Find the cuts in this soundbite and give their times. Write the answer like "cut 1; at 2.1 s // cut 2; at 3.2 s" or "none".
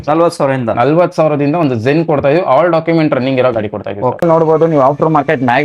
cut 1; at 4.2 s